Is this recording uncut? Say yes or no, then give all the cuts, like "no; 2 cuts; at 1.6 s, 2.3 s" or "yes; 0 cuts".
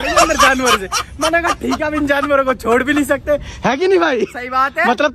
yes; 0 cuts